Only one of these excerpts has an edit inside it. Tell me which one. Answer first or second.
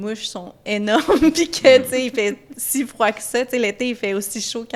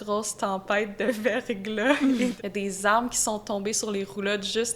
second